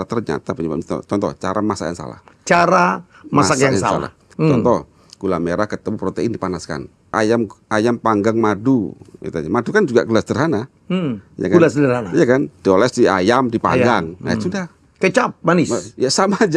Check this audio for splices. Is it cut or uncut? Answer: cut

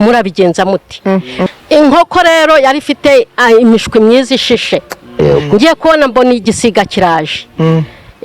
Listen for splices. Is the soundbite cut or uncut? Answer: cut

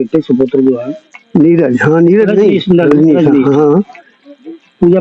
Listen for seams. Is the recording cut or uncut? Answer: uncut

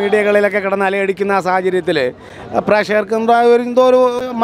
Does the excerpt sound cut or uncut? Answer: uncut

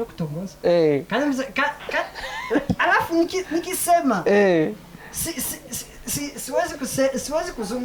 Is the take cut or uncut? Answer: uncut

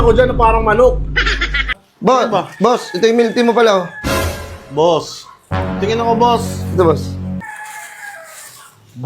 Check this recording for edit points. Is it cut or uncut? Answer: cut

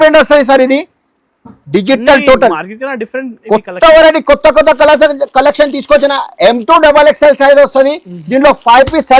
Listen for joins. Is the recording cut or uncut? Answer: uncut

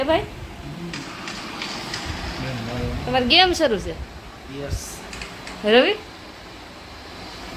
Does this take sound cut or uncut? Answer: uncut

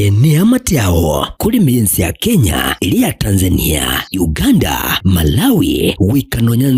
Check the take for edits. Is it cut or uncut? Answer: uncut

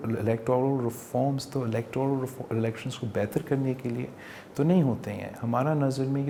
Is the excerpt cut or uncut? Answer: uncut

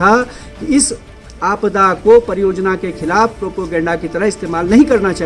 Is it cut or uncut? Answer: uncut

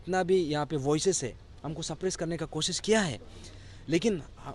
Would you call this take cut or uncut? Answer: uncut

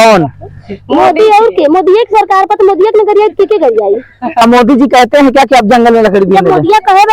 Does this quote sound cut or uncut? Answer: cut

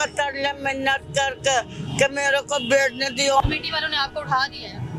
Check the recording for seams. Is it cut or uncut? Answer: cut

